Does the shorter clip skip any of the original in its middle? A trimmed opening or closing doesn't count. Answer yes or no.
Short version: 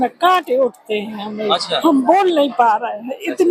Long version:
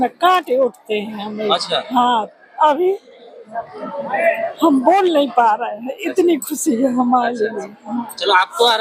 yes